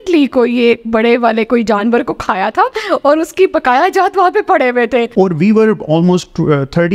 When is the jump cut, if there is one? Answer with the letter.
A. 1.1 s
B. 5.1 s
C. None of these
B